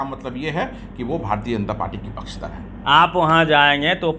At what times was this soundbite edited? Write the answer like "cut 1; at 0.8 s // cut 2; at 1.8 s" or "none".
cut 1; at 2.7 s